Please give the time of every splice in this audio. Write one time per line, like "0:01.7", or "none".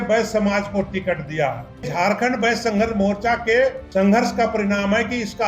0:01.9
0:03.8